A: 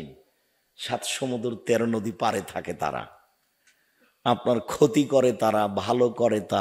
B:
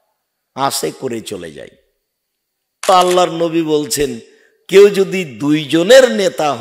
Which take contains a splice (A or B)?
B